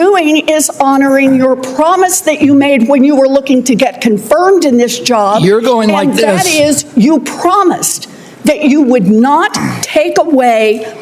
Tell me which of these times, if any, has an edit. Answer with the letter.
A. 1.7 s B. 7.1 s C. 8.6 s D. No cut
D